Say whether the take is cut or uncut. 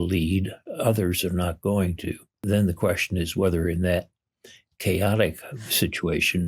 cut